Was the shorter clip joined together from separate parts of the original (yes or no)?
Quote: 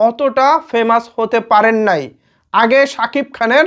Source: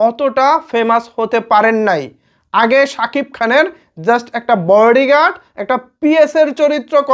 no